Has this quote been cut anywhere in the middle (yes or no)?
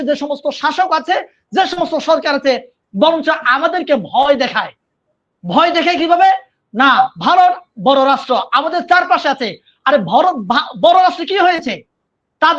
no